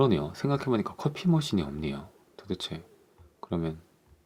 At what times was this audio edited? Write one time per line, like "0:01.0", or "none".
none